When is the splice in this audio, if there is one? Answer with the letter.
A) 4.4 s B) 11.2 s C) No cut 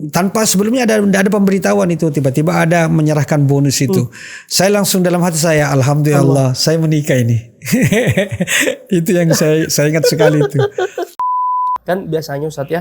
B